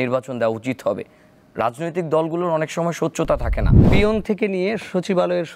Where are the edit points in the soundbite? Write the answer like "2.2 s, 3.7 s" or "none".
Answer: 3.9 s

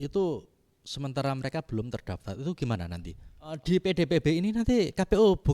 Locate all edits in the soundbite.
3.6 s

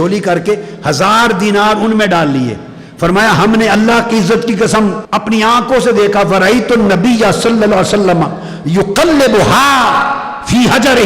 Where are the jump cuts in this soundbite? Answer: 5.0 s

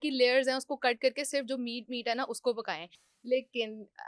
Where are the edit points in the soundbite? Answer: none

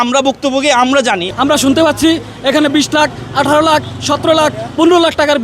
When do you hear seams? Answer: 1.3 s

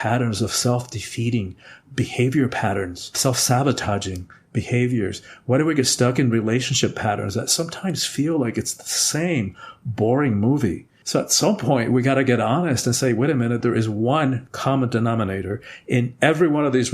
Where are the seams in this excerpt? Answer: 10.9 s

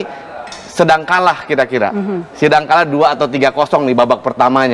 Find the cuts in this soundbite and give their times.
none

